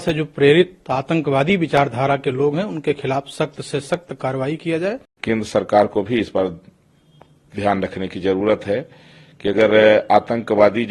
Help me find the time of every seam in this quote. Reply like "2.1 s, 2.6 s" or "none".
5.1 s